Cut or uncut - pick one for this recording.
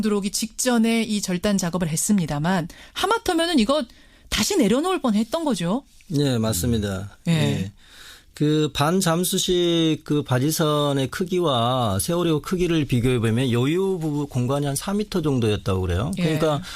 cut